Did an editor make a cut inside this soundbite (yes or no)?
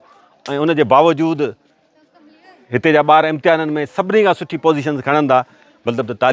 no